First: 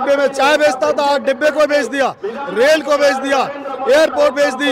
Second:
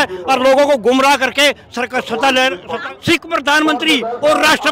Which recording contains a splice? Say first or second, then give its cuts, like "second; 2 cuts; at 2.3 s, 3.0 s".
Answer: second; 1 cut; at 2.8 s